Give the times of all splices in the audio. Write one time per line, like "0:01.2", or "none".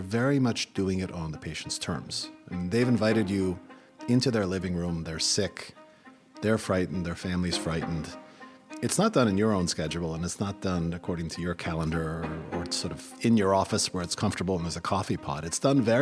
0:13.1